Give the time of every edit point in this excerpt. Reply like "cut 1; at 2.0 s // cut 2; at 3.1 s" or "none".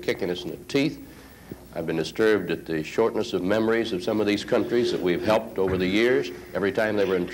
none